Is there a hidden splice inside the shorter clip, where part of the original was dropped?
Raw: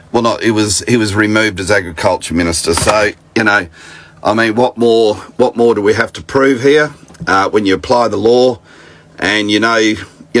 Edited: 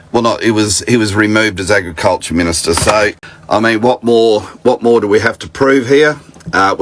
yes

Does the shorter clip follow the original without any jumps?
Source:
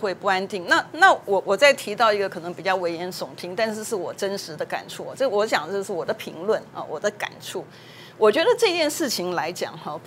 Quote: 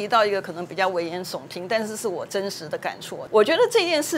no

